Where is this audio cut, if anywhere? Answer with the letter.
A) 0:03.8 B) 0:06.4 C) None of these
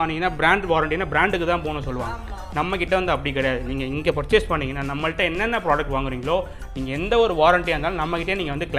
C